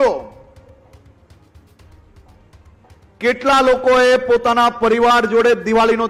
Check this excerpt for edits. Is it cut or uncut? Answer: uncut